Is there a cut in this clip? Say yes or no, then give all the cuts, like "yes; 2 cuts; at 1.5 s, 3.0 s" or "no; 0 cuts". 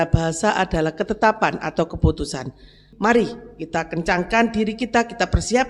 yes; 1 cut; at 2.9 s